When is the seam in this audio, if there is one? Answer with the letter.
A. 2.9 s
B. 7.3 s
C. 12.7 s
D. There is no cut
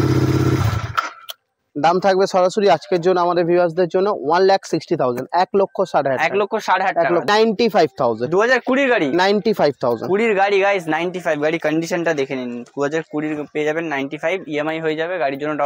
B